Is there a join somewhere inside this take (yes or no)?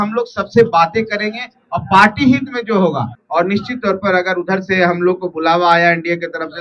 yes